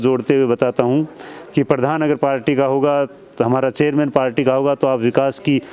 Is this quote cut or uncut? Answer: uncut